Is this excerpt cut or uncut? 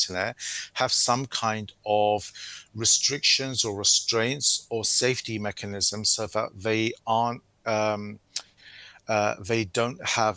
uncut